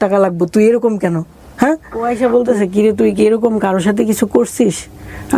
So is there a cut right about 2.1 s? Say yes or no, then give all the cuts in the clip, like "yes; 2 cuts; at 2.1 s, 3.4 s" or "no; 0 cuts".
yes; 1 cut; at 2.1 s